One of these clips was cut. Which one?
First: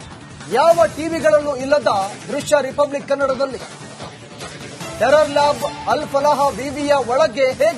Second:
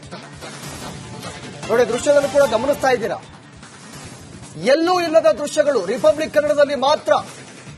second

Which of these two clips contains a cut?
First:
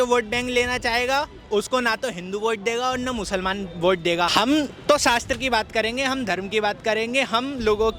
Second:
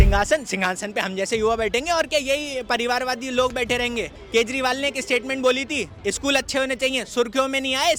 first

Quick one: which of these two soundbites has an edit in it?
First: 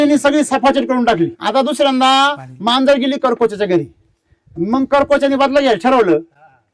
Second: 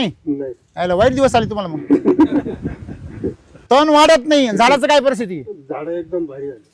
first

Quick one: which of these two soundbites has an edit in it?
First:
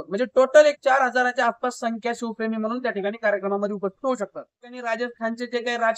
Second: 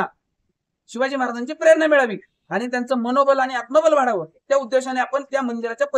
first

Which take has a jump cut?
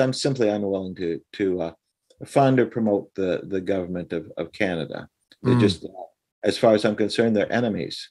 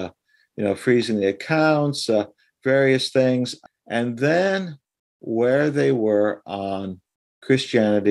second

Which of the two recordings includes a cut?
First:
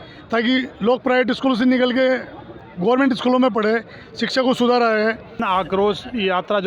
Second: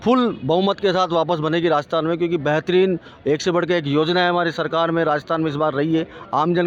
first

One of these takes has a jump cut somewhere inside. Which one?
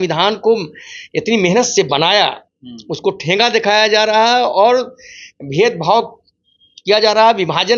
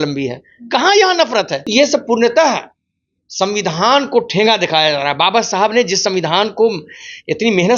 second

